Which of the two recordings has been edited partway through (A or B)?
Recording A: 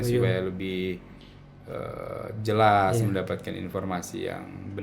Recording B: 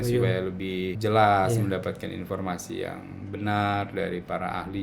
B